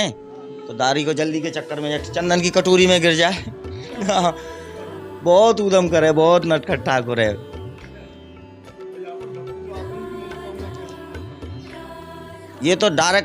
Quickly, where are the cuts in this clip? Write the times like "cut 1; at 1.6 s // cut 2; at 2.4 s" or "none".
none